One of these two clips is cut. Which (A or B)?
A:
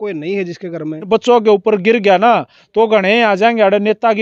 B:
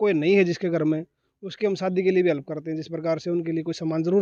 A